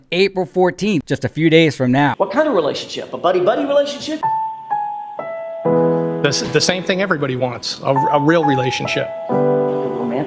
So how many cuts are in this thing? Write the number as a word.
two